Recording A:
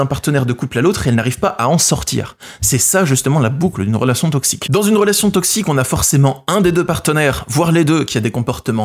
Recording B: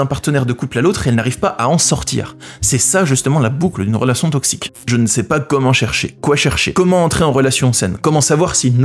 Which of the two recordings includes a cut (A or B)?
B